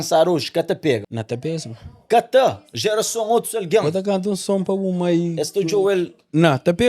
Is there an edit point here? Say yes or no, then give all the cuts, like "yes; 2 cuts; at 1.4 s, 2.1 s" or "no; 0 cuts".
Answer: yes; 1 cut; at 1.1 s